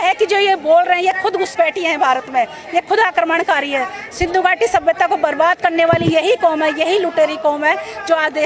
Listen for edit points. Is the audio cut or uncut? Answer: uncut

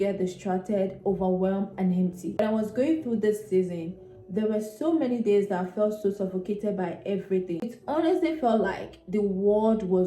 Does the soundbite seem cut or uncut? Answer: uncut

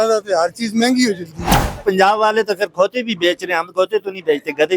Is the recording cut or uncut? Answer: cut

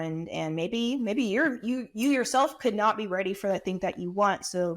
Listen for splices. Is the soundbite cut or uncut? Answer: uncut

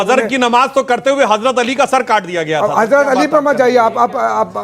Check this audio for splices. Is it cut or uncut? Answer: uncut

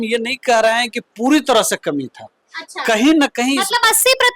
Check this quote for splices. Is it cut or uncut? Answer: uncut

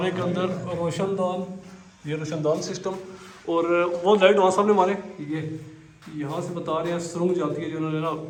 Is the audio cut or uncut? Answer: uncut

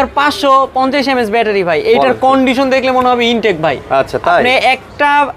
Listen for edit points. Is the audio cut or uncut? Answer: uncut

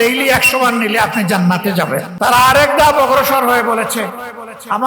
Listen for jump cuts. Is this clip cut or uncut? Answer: cut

